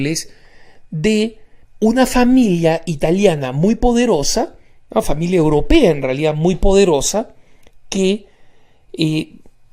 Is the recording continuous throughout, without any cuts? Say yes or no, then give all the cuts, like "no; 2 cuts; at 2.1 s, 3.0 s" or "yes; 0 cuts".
yes; 0 cuts